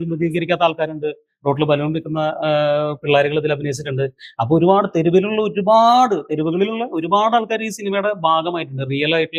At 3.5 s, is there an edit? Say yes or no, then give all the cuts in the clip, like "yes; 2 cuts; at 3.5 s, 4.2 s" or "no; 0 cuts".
no; 0 cuts